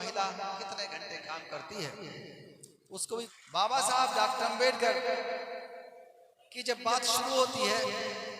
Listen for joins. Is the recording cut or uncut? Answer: cut